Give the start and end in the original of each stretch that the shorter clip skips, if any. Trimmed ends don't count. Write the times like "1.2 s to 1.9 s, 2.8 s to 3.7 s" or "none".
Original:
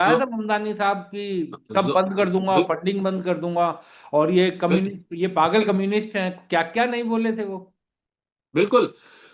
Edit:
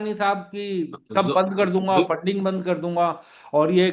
none